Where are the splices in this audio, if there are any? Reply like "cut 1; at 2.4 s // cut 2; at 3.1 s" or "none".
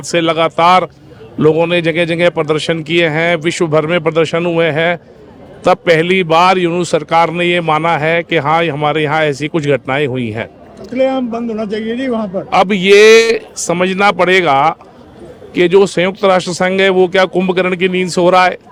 none